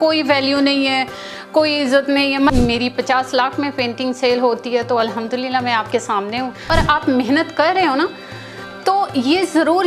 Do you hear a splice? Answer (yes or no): yes